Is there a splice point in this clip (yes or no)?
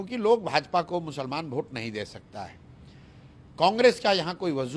no